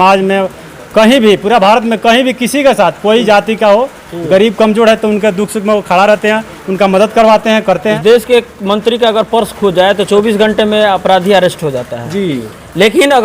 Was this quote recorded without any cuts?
no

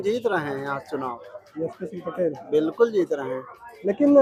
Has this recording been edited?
no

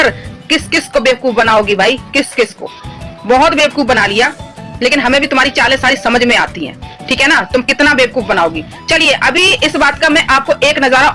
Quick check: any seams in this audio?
no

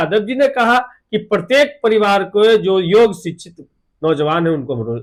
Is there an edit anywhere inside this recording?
no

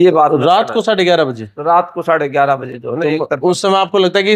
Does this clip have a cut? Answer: no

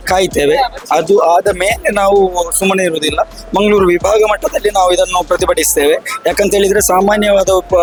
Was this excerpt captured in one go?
yes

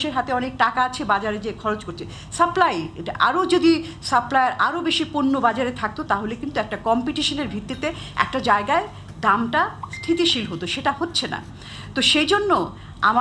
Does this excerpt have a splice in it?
no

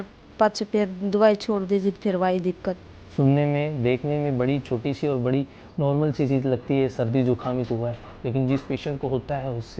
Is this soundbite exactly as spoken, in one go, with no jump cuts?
no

